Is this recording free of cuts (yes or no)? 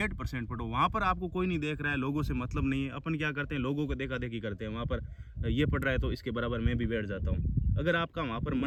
yes